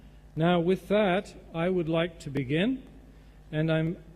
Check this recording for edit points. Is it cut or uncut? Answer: cut